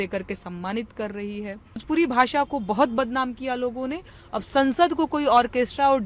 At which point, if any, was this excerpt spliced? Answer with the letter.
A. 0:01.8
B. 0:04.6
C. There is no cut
A